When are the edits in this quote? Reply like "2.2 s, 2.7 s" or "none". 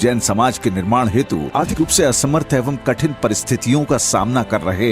1.7 s